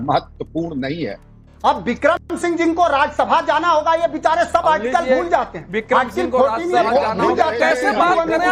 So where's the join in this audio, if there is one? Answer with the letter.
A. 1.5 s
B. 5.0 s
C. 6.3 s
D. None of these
A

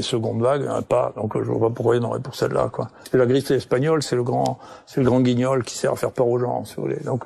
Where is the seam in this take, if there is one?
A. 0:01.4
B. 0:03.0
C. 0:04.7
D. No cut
B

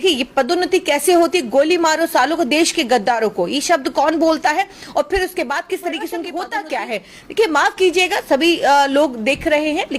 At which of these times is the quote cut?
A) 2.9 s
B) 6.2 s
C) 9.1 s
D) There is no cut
B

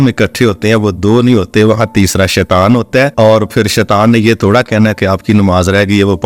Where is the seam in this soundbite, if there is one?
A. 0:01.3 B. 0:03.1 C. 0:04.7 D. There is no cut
B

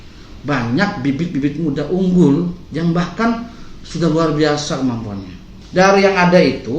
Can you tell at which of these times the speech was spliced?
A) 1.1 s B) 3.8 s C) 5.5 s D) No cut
C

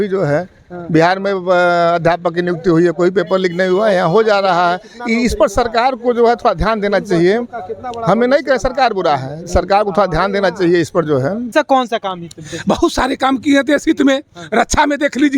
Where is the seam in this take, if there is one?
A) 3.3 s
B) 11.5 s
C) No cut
B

